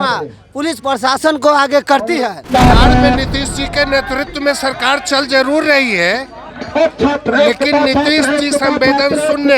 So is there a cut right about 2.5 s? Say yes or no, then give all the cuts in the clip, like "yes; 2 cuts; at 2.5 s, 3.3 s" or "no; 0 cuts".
yes; 1 cut; at 2.5 s